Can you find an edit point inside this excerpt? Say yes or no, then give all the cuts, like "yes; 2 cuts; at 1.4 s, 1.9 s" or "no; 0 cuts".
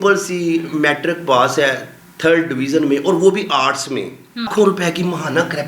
yes; 1 cut; at 4.5 s